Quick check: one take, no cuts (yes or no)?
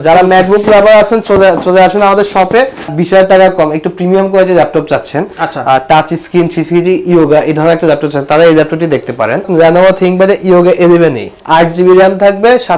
no